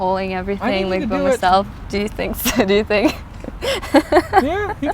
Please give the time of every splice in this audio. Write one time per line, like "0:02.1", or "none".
0:01.7